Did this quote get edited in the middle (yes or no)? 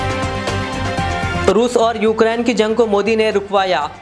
no